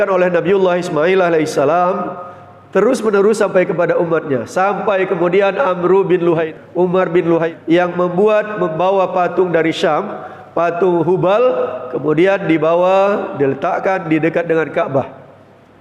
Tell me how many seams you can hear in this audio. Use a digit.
2